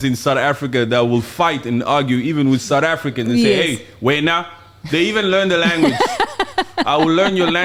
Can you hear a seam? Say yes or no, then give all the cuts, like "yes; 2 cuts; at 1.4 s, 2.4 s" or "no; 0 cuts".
no; 0 cuts